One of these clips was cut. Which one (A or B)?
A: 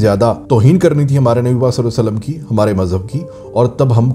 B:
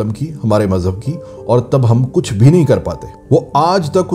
B